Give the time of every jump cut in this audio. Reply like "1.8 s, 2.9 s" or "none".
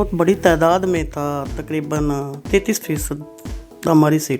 none